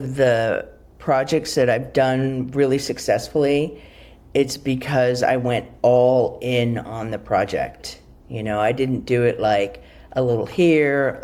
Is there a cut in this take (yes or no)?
no